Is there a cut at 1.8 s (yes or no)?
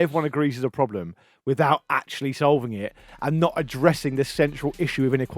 no